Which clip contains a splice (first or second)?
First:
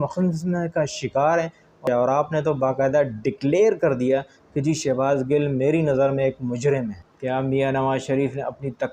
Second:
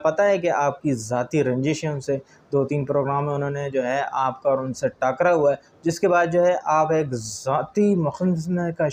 first